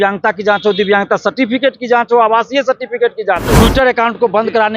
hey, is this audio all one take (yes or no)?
no